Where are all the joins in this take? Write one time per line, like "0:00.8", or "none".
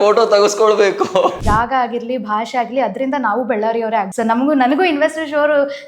0:01.4
0:04.1